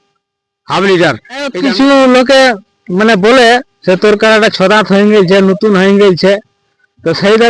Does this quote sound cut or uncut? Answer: cut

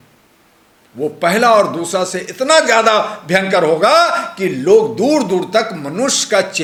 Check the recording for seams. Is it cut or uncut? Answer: uncut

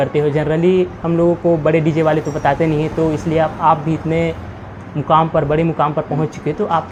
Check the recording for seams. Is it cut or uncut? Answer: uncut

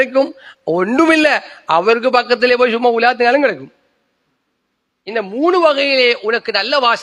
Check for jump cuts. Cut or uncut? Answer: uncut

